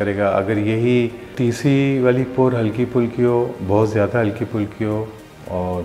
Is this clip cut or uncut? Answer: cut